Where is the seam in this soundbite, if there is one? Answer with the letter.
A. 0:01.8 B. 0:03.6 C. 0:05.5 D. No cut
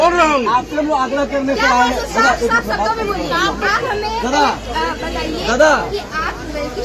B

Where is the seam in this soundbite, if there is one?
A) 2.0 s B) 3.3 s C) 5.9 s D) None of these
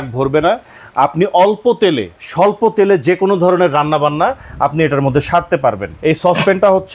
C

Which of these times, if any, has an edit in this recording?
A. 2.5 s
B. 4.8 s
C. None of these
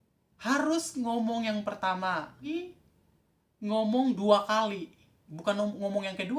A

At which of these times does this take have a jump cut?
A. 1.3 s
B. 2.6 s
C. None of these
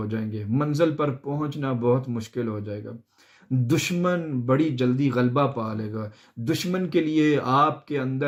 C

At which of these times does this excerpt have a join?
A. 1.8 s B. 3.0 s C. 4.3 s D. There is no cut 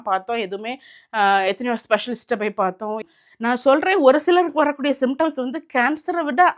B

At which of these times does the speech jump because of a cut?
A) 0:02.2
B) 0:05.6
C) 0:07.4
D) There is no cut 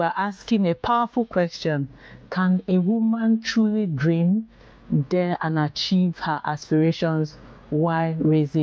D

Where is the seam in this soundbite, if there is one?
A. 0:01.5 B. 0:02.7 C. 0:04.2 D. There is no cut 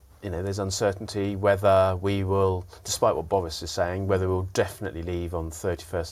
D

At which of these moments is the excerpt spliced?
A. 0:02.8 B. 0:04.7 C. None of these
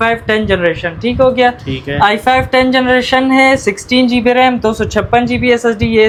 C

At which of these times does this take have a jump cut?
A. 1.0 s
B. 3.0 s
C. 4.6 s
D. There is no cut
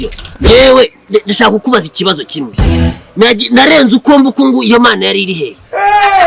D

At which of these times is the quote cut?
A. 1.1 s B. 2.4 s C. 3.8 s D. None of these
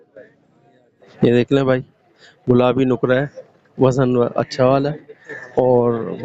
A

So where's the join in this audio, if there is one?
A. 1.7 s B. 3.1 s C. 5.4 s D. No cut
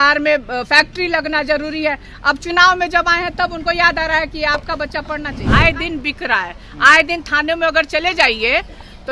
C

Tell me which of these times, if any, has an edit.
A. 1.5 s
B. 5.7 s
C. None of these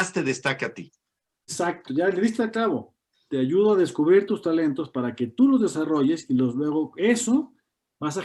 A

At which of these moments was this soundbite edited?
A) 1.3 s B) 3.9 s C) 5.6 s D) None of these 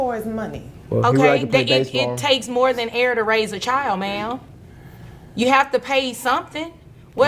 D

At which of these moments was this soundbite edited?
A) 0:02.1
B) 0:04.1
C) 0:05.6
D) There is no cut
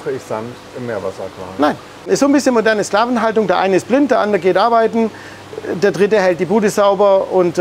A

